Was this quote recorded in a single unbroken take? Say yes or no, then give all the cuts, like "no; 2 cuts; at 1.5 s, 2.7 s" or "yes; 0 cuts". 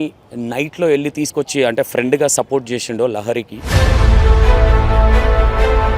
no; 1 cut; at 3.7 s